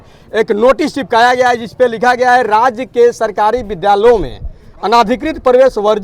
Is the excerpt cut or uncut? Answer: uncut